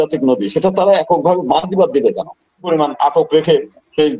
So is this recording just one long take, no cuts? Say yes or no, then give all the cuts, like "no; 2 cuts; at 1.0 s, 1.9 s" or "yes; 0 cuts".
no; 1 cut; at 2.7 s